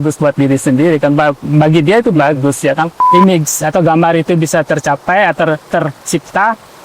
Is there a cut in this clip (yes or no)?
yes